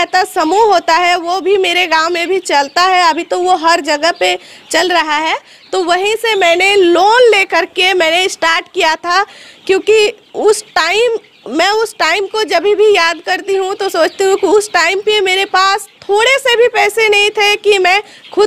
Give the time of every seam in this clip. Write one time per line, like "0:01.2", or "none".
none